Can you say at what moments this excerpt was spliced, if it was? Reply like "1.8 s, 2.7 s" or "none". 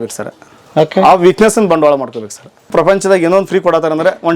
2.7 s